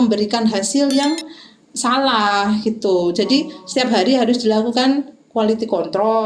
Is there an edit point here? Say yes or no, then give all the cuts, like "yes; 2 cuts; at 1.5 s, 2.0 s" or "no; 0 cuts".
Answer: no; 0 cuts